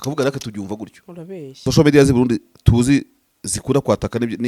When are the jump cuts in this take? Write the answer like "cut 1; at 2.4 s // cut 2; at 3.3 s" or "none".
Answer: cut 1; at 1.6 s